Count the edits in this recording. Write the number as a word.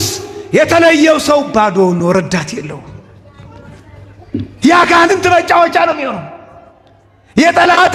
zero